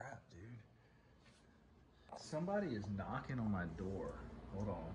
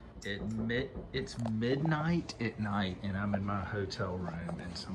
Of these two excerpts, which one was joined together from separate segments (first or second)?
first